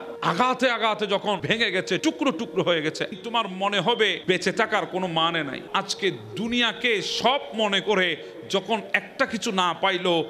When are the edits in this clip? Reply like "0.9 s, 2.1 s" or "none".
1.4 s